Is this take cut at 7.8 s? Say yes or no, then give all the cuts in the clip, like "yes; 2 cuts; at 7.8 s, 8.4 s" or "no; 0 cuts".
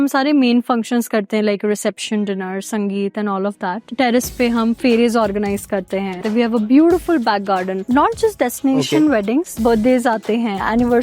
yes; 3 cuts; at 6.1 s, 7.8 s, 9.5 s